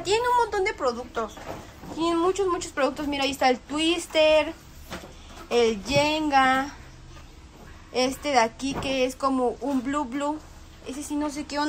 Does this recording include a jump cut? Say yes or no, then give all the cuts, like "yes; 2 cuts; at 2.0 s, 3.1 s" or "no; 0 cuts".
no; 0 cuts